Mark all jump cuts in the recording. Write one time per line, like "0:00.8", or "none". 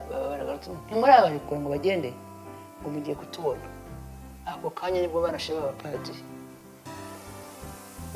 0:06.9